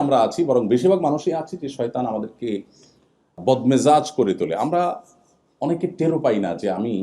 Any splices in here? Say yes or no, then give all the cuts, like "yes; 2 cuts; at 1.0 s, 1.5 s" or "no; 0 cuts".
yes; 1 cut; at 3.4 s